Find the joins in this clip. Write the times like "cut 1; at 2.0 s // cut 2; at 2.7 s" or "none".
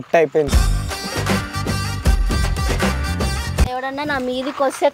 cut 1; at 3.7 s